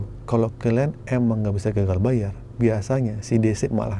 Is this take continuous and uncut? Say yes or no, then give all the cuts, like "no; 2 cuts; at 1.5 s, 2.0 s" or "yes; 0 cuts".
yes; 0 cuts